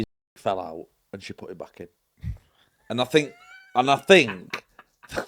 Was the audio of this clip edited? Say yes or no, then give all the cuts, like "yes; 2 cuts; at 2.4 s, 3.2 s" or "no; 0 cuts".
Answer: no; 0 cuts